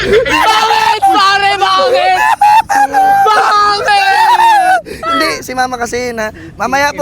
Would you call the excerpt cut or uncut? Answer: uncut